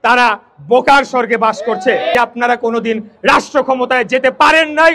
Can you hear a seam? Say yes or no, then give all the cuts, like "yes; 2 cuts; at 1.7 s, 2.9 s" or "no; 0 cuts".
yes; 1 cut; at 2.1 s